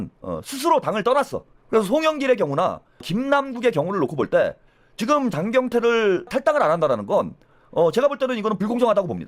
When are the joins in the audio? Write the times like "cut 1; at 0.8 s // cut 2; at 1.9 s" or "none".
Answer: cut 1; at 1.5 s // cut 2; at 3.1 s // cut 3; at 6.3 s